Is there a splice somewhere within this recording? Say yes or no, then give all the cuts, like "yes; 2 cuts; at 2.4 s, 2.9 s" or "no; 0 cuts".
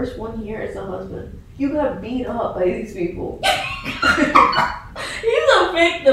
no; 0 cuts